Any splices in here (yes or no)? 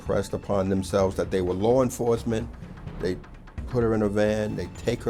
no